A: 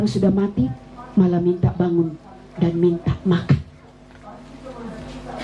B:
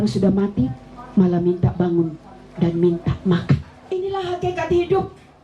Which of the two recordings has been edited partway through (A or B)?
B